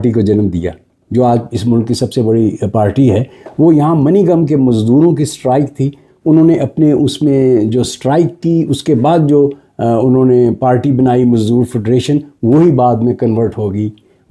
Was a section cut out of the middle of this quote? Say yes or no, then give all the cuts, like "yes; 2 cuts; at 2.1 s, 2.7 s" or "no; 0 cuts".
no; 0 cuts